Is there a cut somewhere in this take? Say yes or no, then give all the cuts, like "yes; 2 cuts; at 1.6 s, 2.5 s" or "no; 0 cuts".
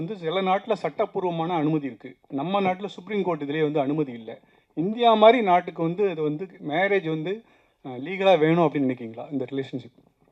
no; 0 cuts